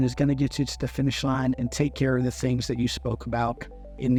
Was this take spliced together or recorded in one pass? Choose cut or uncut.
uncut